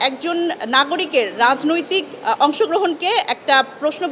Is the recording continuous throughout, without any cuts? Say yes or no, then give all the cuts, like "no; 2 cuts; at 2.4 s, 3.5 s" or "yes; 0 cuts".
yes; 0 cuts